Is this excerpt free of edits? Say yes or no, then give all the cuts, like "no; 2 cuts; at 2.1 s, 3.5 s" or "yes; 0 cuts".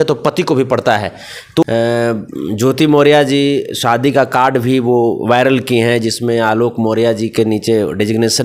no; 1 cut; at 1.7 s